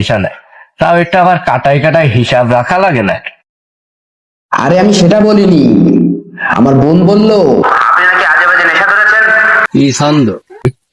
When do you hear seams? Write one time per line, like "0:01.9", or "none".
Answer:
0:09.6